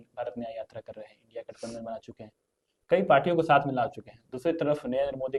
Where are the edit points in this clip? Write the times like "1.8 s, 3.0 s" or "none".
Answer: none